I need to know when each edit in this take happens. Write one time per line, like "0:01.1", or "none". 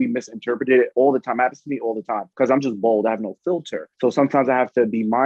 0:03.8